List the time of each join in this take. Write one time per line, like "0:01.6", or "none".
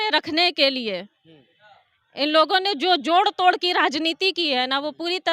none